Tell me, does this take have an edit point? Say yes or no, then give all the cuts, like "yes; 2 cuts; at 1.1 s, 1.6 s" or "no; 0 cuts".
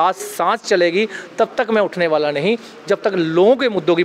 no; 0 cuts